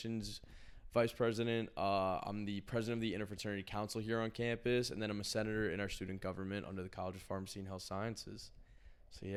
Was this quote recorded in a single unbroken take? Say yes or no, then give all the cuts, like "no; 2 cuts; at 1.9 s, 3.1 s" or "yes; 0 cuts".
yes; 0 cuts